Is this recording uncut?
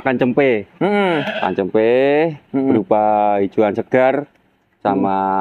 yes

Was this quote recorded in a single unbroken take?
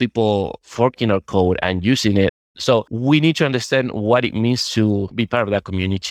yes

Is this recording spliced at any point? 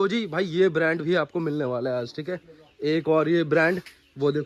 no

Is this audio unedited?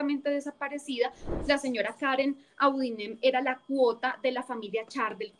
no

